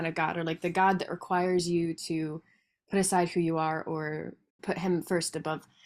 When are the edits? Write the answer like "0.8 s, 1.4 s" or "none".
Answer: 4.6 s